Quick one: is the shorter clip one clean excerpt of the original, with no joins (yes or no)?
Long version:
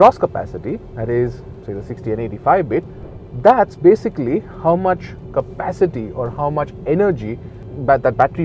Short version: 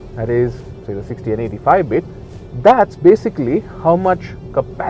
yes